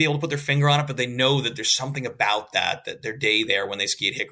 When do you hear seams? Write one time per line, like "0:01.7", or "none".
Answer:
none